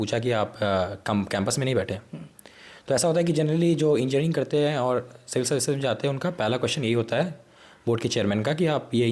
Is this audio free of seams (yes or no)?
yes